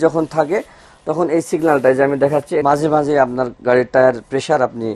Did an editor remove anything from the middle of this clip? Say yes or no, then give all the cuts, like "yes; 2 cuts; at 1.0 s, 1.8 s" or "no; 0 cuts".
yes; 1 cut; at 2.6 s